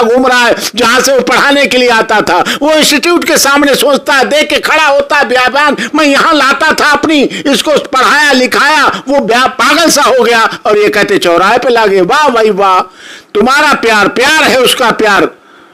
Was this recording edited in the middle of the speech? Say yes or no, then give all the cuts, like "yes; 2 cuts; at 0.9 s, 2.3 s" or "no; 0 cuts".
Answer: no; 0 cuts